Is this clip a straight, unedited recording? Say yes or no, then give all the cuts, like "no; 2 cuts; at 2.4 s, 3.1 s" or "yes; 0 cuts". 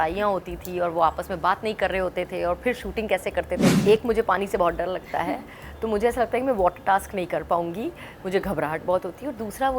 no; 1 cut; at 3.8 s